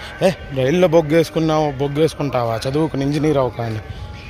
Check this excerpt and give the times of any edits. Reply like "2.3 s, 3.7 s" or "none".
none

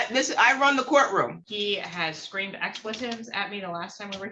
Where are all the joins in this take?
1.3 s

